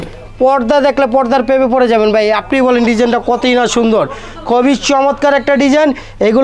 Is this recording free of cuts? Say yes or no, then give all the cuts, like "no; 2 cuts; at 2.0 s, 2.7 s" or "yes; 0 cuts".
yes; 0 cuts